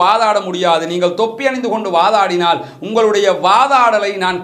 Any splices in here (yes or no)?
no